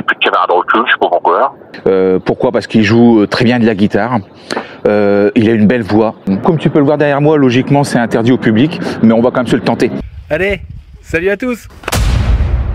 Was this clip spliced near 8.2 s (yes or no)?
no